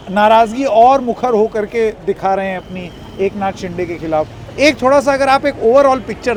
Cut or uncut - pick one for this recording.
uncut